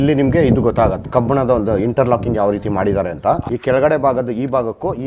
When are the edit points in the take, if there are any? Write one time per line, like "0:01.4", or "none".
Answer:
0:01.0
0:03.5